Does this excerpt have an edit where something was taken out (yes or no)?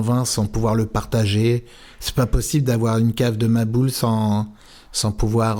no